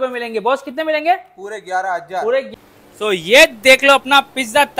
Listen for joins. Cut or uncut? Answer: cut